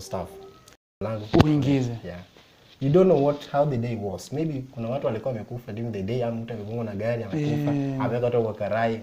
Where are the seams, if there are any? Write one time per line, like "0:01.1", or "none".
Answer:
0:00.9